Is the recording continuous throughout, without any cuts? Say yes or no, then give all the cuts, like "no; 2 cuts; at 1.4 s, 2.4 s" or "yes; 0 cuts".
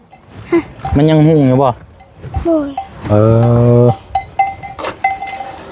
yes; 0 cuts